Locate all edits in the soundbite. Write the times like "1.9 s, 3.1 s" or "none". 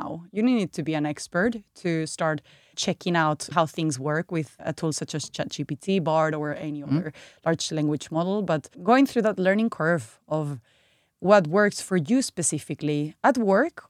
4.5 s, 8.7 s